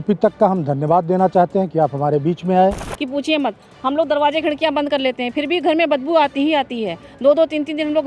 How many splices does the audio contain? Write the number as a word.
one